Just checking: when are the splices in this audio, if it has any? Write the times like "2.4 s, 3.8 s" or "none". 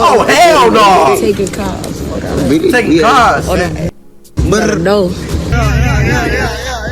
5.5 s